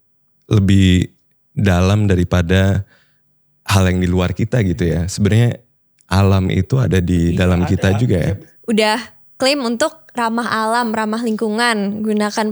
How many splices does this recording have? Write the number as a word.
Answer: one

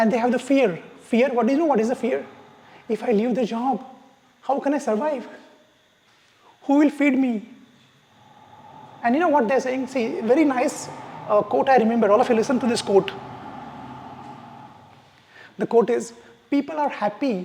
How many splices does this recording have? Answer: zero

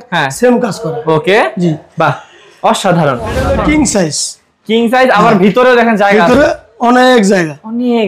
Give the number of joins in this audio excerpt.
one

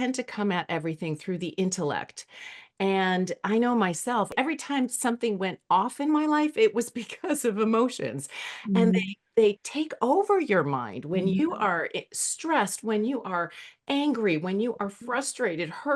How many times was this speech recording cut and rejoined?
one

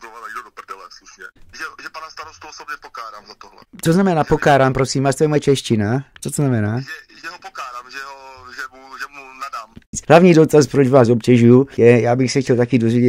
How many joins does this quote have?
two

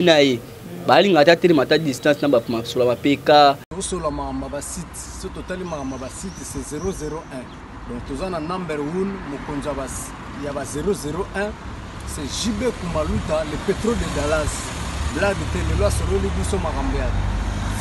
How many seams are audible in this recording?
one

